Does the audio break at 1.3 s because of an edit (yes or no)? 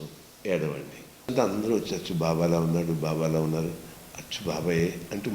yes